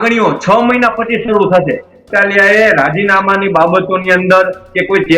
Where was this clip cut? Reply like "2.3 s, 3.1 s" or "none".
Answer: 2.1 s